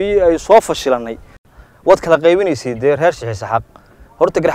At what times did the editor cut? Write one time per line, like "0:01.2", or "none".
0:01.5

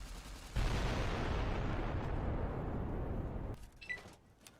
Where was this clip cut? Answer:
0:03.5

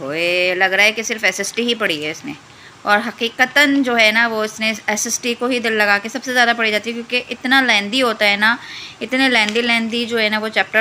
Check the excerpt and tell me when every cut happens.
none

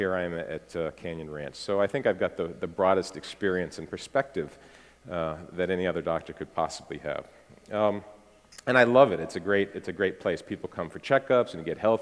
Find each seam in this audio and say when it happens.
0:07.6

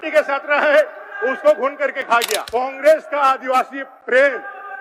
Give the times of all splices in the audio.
0:02.4

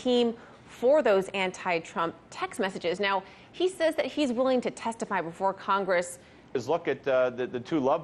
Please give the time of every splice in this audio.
none

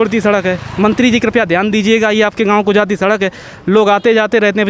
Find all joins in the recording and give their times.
none

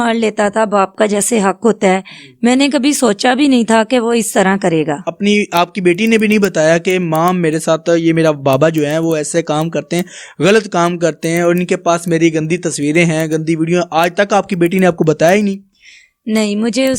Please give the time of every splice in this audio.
0:05.1

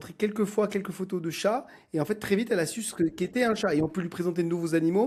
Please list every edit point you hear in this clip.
none

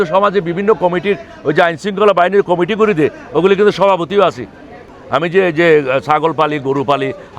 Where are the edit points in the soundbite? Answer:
0:05.0

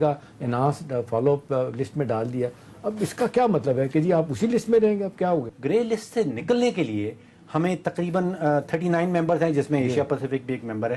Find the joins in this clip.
0:05.5

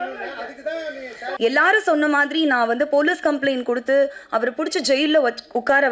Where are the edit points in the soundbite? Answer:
0:01.2

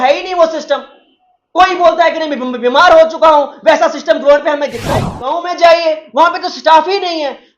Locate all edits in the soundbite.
0:05.3

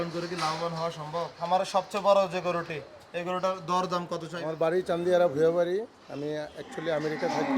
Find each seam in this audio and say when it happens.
0:01.4
0:04.4

